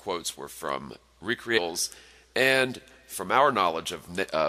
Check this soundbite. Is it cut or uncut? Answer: uncut